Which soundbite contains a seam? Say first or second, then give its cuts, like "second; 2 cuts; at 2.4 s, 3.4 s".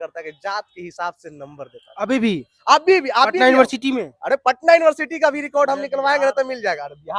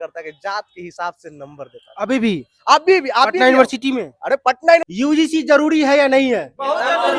second; 1 cut; at 4.8 s